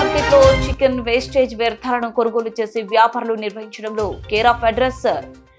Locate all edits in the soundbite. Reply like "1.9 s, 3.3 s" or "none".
none